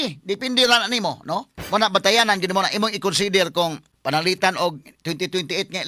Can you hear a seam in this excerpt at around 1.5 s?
yes; 2 cuts; at 1.5 s, 3.9 s

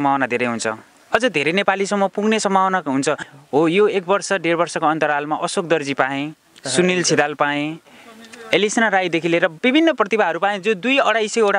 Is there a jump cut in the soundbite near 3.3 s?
yes; 1 cut; at 3.3 s

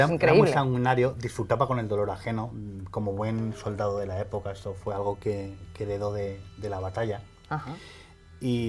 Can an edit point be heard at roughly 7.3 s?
yes; 1 cut; at 7.3 s

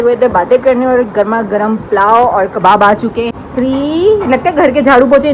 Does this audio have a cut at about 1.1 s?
no; 1 cut; at 3.3 s

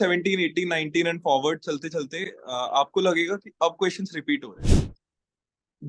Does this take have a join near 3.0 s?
no; 1 cut; at 4.9 s

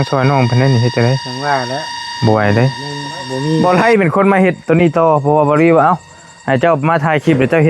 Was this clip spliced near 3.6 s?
yes; 1 cut; at 3.6 s

